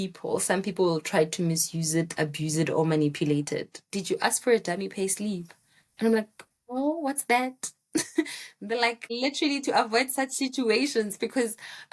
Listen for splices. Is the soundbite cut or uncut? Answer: cut